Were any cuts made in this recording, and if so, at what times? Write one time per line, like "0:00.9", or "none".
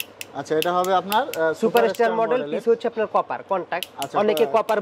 none